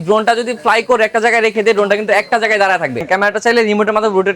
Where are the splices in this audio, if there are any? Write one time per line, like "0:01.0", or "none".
0:03.0